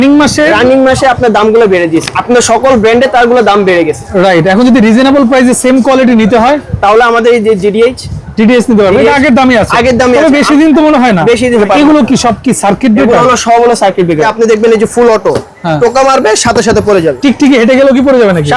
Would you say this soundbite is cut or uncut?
cut